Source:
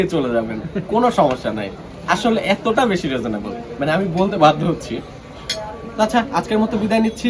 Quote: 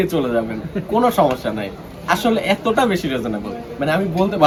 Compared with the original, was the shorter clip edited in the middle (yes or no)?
no